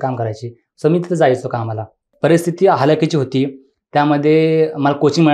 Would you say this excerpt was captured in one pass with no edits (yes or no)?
no